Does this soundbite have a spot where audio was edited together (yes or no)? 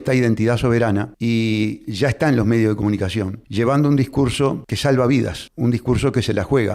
yes